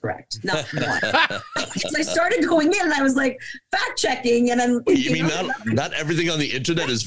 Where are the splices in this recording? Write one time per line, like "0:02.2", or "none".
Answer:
none